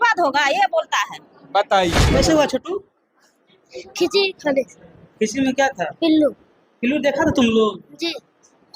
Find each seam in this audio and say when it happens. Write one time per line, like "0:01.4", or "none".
0:02.0